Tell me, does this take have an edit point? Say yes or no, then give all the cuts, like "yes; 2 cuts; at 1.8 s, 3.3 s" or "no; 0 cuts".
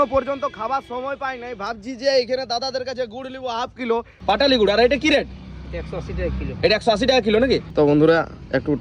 yes; 2 cuts; at 4.1 s, 7.7 s